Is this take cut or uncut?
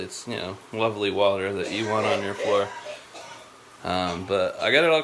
uncut